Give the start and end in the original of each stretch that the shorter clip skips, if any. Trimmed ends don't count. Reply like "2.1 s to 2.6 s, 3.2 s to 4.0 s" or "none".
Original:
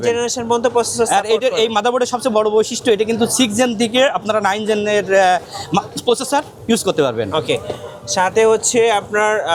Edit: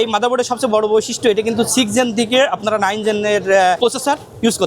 5.4 s to 6.0 s